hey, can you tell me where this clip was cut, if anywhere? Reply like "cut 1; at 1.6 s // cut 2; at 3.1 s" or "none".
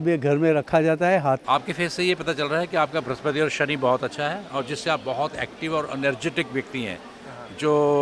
cut 1; at 1.4 s